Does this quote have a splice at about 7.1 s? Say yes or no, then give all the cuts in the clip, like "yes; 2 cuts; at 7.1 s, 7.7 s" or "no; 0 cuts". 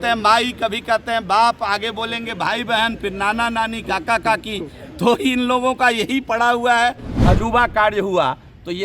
yes; 1 cut; at 7.1 s